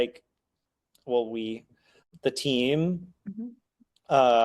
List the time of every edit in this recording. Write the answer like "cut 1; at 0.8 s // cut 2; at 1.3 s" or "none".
cut 1; at 1.9 s